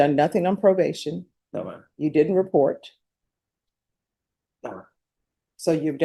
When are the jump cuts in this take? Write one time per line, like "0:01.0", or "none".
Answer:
none